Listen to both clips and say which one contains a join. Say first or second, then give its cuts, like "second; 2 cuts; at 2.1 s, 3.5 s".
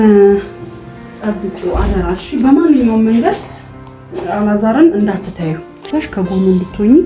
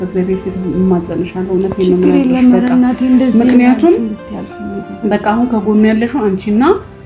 first; 1 cut; at 5.8 s